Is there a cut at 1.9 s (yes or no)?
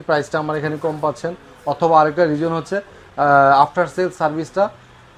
no